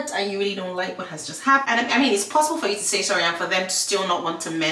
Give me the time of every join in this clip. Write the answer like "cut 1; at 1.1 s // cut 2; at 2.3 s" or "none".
cut 1; at 1.6 s